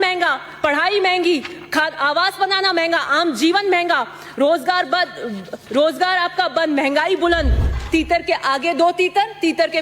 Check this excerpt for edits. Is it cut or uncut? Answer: cut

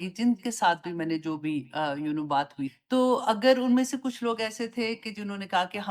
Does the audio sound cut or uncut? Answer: uncut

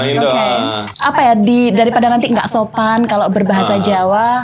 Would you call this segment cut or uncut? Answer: cut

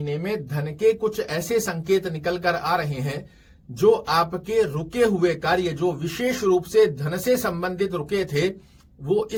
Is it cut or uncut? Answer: uncut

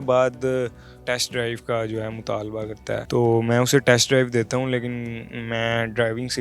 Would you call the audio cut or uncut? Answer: cut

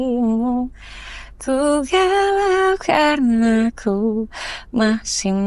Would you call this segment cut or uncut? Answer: uncut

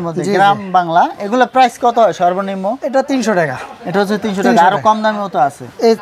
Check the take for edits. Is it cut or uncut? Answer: uncut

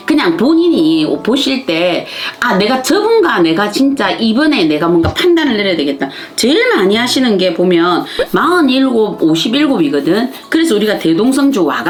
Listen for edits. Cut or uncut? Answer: uncut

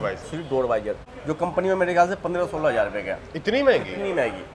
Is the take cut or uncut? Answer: cut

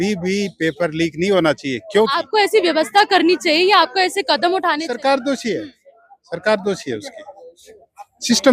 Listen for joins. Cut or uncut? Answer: cut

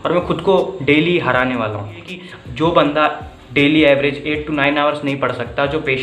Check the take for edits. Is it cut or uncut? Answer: cut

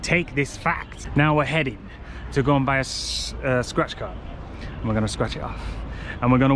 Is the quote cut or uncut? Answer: cut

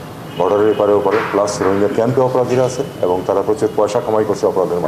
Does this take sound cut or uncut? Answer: uncut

